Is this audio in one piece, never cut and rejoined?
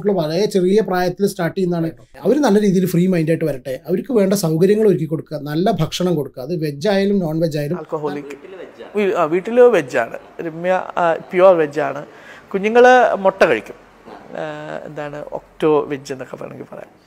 no; 2 cuts; at 2.0 s, 7.9 s

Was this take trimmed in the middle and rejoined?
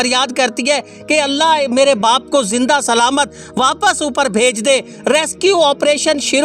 no; 0 cuts

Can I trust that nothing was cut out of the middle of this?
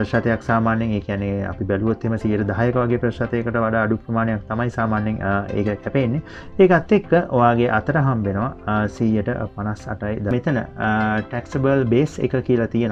no; 1 cut; at 10.3 s

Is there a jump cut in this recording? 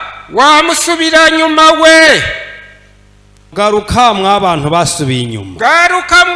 yes; 1 cut; at 3.5 s

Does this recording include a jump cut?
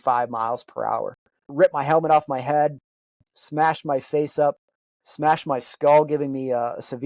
yes; 1 cut; at 1.5 s

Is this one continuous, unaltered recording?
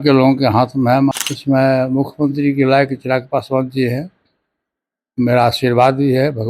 no; 1 cut; at 1.1 s

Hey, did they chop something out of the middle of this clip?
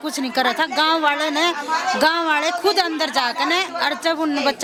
no; 0 cuts

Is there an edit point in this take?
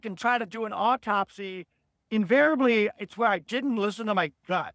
no; 0 cuts

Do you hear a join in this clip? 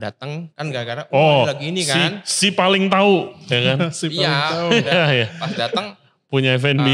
no; 0 cuts

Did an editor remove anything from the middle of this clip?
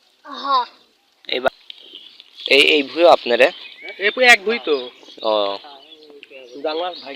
yes; 1 cut; at 1.5 s

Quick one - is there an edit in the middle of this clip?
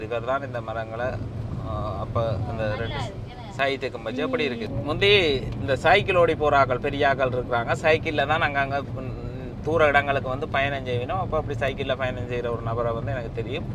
yes; 1 cut; at 4.6 s

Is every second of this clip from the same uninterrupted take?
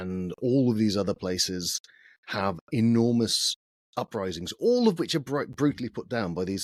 yes; 0 cuts

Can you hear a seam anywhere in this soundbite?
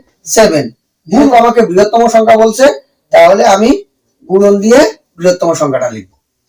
yes; 1 cut; at 1.3 s

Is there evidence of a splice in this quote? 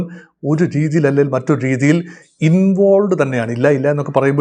no; 0 cuts

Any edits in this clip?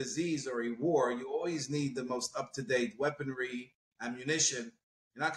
no; 0 cuts

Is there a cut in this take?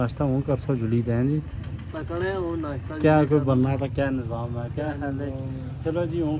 no; 0 cuts

